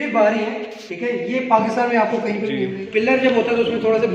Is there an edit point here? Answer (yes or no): yes